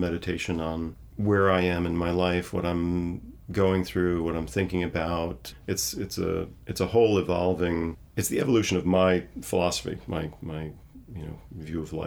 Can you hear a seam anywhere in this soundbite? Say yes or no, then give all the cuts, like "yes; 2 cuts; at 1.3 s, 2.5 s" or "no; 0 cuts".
no; 0 cuts